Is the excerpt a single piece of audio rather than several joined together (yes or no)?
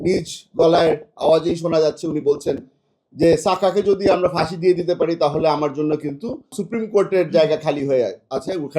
no